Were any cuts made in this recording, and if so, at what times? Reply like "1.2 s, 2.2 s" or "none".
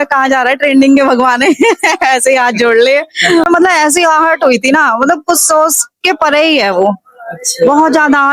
3.5 s